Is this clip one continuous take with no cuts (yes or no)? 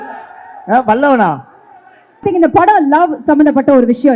no